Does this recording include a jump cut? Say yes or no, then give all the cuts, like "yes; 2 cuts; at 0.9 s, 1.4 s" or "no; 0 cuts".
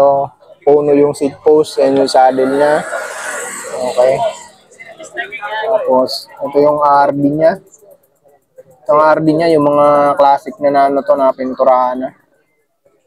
no; 0 cuts